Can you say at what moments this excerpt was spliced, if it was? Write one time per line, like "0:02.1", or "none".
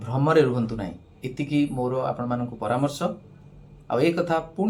none

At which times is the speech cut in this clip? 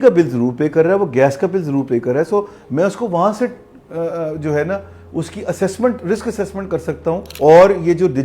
0:07.3

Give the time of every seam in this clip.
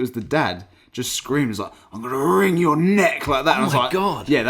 none

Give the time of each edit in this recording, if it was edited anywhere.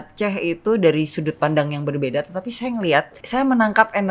0:03.2

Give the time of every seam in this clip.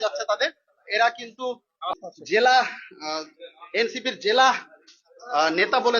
0:01.9

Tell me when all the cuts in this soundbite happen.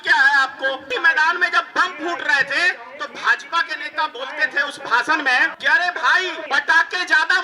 0:00.9
0:02.9
0:05.6
0:06.4

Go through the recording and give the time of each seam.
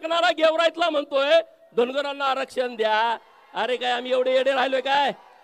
none

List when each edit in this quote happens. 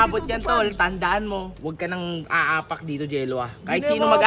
0:01.5

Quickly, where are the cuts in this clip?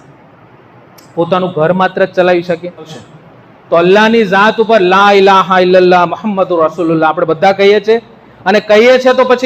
0:02.9

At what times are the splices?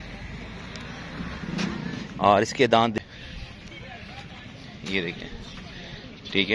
0:02.9

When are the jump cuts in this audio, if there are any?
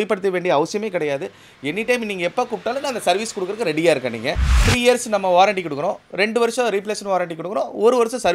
0:04.7

